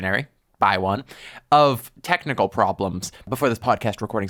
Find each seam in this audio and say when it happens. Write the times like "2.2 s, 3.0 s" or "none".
none